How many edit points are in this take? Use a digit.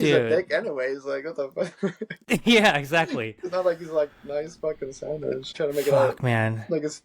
1